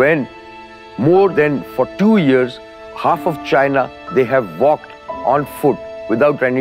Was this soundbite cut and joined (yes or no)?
no